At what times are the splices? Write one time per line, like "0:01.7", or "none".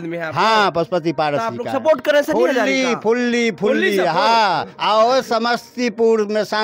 none